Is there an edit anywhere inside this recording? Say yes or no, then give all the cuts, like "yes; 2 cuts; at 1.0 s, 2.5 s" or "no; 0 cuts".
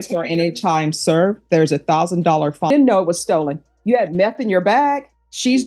yes; 1 cut; at 2.7 s